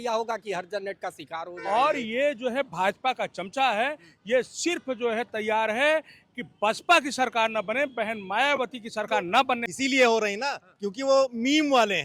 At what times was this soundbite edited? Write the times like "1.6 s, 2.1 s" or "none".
1.5 s, 9.7 s

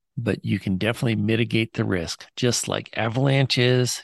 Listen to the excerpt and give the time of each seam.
none

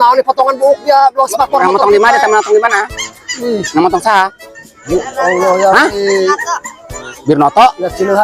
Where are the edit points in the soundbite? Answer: none

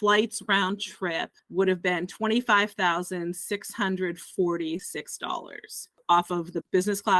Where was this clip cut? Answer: 5.9 s

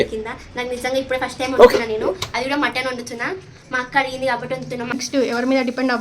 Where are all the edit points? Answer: 5.0 s

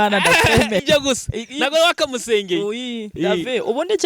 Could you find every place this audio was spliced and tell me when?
3.1 s

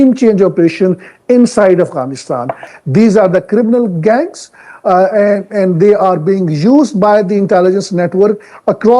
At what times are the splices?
2.7 s

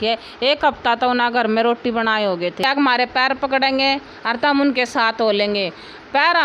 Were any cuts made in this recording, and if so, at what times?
2.6 s

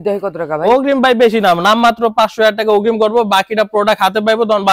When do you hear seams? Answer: none

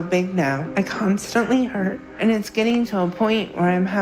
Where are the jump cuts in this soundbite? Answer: 2.1 s

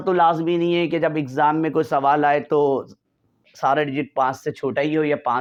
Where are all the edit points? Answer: none

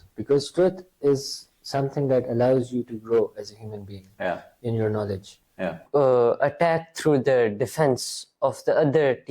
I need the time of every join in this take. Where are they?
5.9 s

